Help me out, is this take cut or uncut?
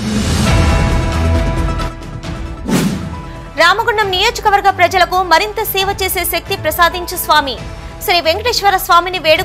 cut